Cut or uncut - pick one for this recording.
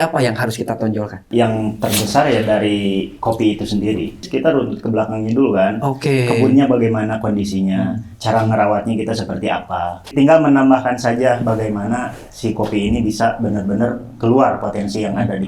cut